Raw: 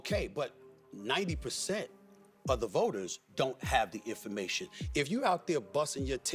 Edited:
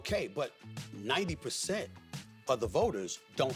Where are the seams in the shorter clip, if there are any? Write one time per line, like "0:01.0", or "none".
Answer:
none